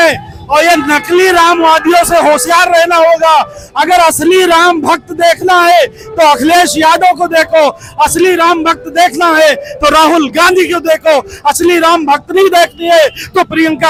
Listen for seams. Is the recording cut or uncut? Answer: uncut